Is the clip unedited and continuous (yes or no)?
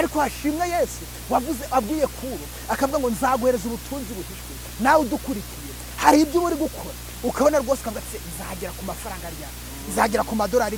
yes